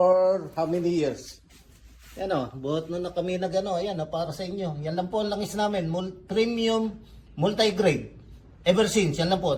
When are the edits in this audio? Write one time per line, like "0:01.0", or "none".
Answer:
none